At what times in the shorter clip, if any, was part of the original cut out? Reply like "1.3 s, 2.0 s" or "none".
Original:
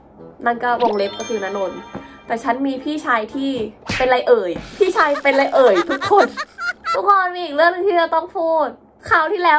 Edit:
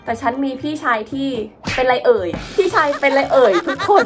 none